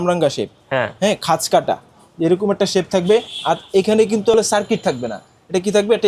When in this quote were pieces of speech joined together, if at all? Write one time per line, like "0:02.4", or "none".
0:04.3